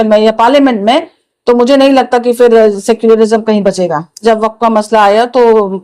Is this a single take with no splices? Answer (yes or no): no